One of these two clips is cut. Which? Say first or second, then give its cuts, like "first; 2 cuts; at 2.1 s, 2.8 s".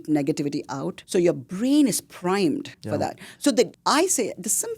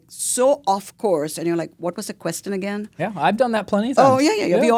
first; 3 cuts; at 0.9 s, 2.7 s, 3.8 s